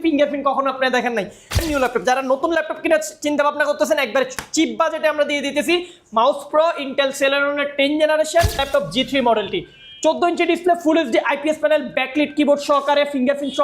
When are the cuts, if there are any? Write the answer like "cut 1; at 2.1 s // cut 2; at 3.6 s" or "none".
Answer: cut 1; at 1.6 s // cut 2; at 8.7 s